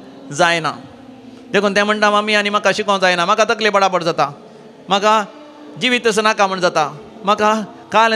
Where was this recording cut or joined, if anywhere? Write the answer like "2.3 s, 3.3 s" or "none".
none